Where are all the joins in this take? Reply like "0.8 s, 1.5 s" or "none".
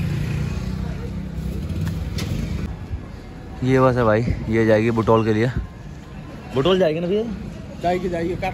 2.7 s